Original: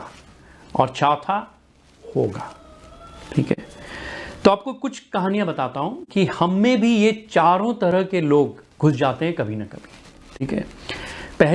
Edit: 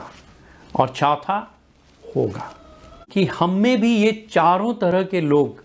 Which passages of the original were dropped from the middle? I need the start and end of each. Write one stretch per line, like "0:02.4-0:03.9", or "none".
0:03.0-0:06.0